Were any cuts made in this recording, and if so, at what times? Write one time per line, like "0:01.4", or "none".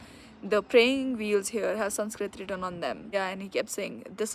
0:03.1